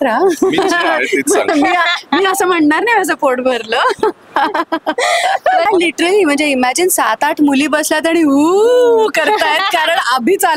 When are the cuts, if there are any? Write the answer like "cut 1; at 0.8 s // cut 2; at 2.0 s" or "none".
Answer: cut 1; at 5.7 s